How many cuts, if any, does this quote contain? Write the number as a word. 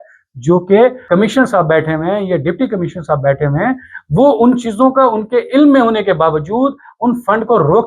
one